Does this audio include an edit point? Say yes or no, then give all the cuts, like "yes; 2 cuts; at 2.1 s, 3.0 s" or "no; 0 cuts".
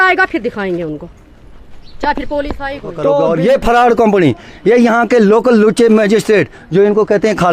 yes; 1 cut; at 3.2 s